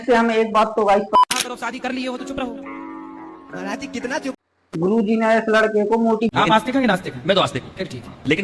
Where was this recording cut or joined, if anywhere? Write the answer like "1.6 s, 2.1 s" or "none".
1.1 s, 4.4 s, 6.3 s